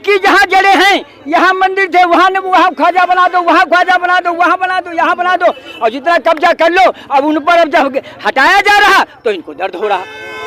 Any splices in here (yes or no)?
no